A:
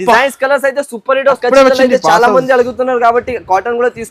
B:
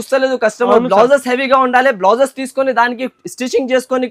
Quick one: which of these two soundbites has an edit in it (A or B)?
A